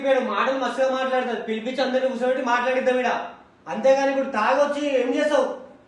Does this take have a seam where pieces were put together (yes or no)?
no